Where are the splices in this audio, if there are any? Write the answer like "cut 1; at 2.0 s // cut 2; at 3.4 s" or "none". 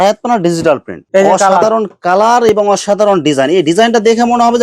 cut 1; at 1.0 s